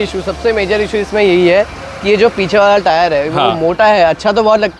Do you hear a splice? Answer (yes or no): no